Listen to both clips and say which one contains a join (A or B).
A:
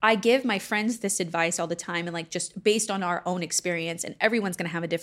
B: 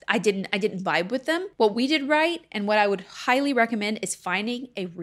B